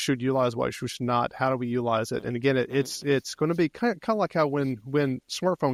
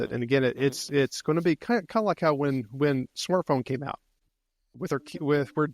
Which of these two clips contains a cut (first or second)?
second